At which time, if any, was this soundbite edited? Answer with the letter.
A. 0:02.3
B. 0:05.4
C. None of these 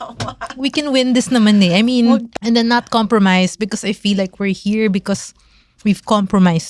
A